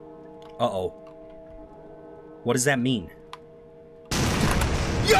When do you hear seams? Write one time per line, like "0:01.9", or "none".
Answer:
none

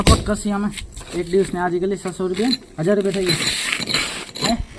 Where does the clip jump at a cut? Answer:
none

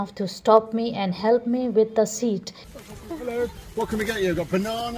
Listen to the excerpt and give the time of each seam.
0:02.6

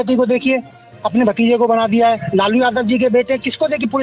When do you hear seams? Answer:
none

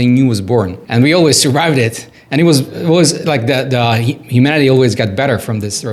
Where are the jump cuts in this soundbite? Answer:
none

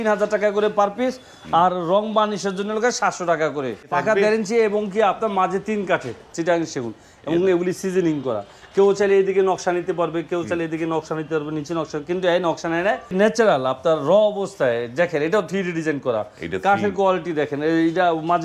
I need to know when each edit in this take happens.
0:03.8
0:06.3
0:13.1

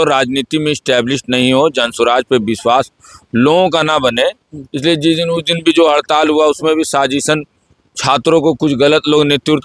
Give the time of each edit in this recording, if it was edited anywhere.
none

